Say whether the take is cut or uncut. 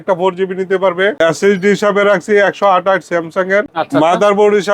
cut